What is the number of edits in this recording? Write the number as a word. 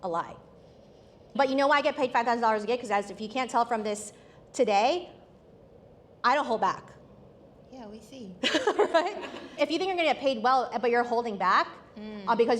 two